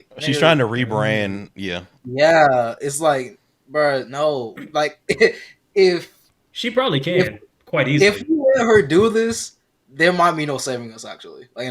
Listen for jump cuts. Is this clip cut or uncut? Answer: uncut